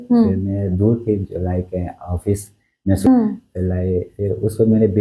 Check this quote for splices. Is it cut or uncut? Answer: cut